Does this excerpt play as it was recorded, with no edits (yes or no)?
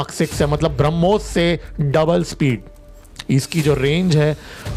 yes